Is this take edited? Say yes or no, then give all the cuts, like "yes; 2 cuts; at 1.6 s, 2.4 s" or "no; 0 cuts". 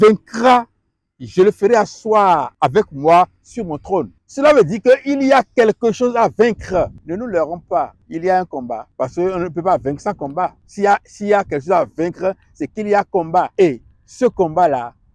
yes; 7 cuts; at 2.5 s, 4.2 s, 7.0 s, 8.0 s, 8.9 s, 10.6 s, 13.5 s